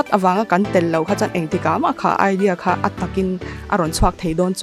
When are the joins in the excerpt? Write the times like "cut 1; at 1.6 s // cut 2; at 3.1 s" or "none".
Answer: none

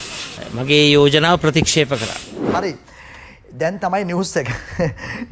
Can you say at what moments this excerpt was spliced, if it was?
cut 1; at 2.4 s

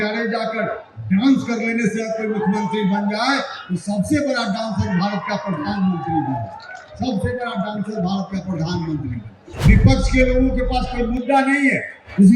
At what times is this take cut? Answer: cut 1; at 9.5 s

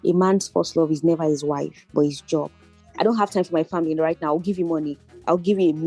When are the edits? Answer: cut 1; at 2.8 s

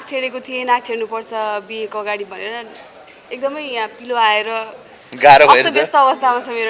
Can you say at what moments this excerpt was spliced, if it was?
none

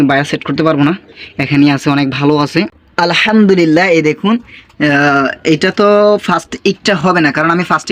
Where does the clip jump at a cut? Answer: cut 1; at 2.5 s

